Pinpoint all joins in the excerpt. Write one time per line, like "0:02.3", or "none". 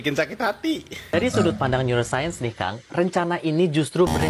0:01.1